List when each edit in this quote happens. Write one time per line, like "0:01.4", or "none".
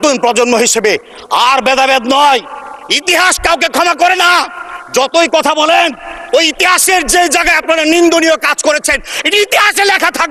none